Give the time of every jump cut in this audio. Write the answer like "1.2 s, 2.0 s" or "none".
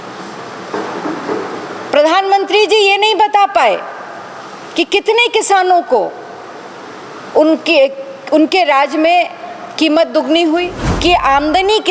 10.8 s